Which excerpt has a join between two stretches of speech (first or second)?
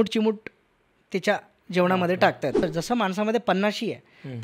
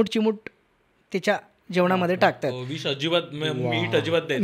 first